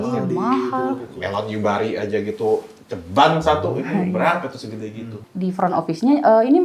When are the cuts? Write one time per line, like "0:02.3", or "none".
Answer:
0:05.2